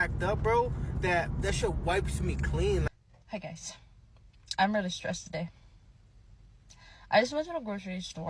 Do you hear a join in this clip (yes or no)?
yes